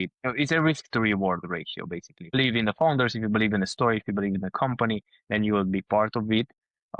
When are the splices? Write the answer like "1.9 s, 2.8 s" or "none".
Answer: 2.3 s